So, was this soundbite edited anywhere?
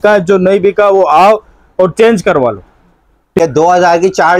yes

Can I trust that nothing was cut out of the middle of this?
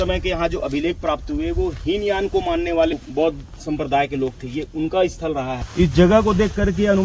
no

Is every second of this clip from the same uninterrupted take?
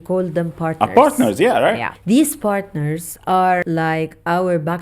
no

